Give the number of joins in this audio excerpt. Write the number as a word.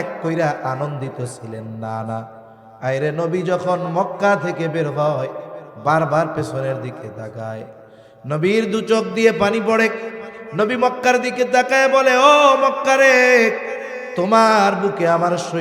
zero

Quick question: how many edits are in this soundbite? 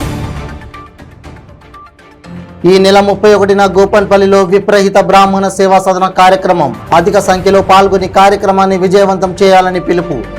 one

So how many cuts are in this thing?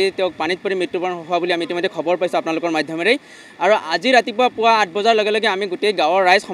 zero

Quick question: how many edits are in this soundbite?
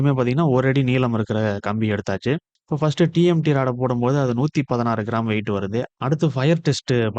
one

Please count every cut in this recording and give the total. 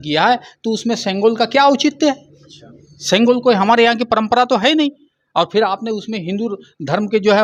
zero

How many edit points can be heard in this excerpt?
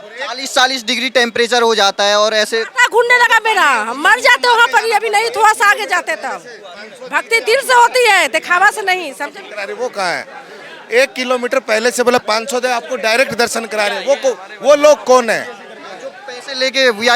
zero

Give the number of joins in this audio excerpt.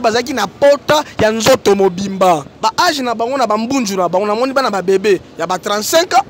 one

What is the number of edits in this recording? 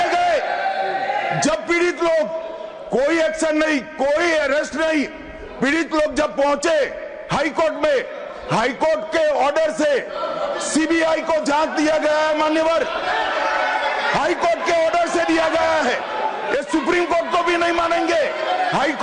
zero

